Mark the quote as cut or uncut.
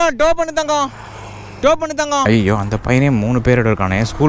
cut